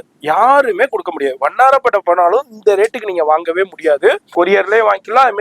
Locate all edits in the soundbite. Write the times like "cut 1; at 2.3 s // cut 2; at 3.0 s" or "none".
cut 1; at 4.2 s